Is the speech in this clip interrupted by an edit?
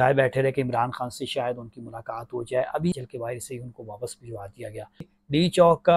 yes; 2 cuts; at 2.9 s, 5.1 s

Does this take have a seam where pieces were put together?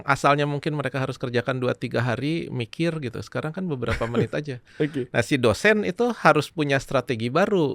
no; 0 cuts

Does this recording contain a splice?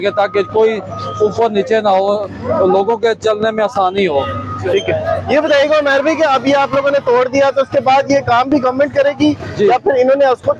no; 0 cuts

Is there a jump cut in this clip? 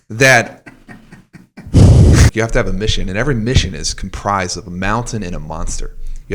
yes; 1 cut; at 2.3 s

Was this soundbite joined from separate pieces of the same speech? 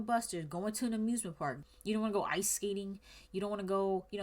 yes; 1 cut; at 1.6 s

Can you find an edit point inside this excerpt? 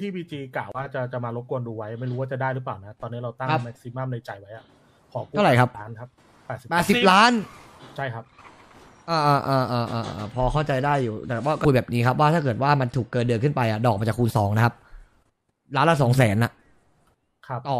yes; 1 cut; at 11.6 s

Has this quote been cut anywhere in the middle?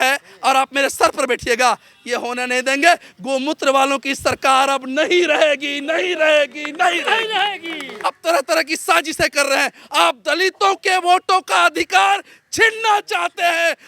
yes; 1 cut; at 7.9 s

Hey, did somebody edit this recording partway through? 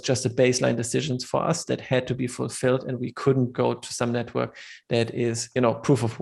no; 0 cuts

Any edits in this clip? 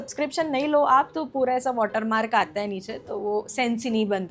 no; 0 cuts

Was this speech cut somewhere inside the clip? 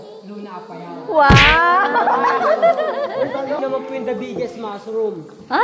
yes; 1 cut; at 3.6 s

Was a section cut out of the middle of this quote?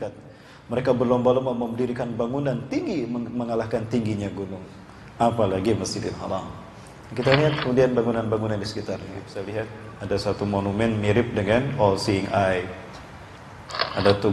yes; 1 cut; at 9.3 s

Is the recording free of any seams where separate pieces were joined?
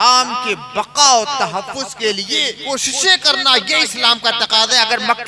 no; 1 cut; at 2.6 s

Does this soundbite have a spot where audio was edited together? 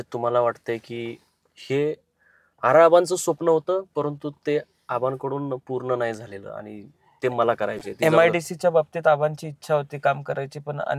no; 0 cuts

